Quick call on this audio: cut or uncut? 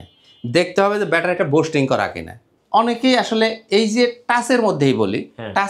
cut